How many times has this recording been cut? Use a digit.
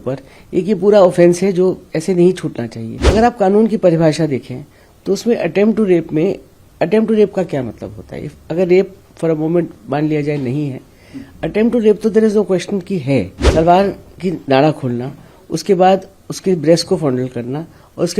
2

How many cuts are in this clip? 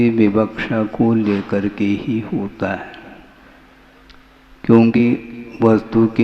1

